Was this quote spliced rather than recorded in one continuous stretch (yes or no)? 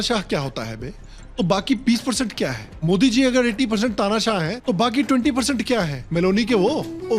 no